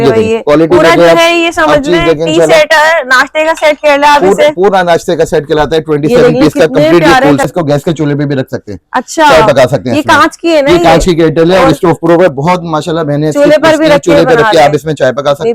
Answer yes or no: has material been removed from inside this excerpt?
yes